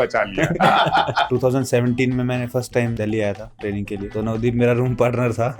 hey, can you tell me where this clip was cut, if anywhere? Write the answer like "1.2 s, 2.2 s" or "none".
1.3 s, 2.9 s, 4.1 s